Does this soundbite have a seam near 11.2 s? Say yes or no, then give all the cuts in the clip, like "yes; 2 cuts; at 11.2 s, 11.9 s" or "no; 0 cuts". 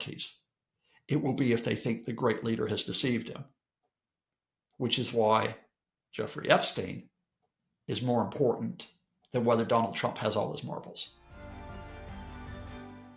yes; 1 cut; at 11.2 s